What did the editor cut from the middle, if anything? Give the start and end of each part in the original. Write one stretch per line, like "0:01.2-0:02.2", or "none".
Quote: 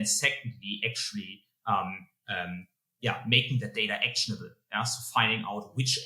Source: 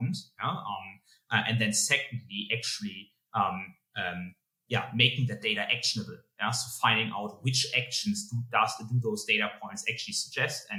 none